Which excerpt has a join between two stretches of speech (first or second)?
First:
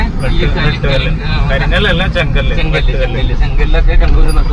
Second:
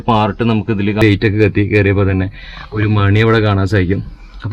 second